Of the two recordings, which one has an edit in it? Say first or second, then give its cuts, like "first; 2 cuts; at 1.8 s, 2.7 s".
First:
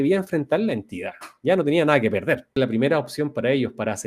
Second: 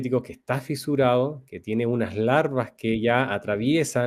first; 1 cut; at 2.5 s